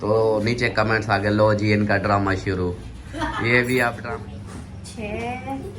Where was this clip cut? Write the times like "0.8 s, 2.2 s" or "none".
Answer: 4.0 s